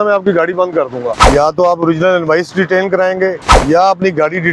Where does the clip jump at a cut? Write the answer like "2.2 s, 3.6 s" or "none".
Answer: 1.2 s, 3.5 s